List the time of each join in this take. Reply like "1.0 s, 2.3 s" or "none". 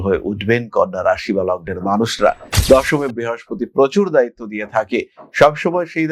2.5 s